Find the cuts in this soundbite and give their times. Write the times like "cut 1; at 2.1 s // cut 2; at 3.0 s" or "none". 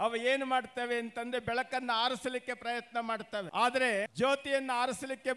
cut 1; at 3.5 s // cut 2; at 4.1 s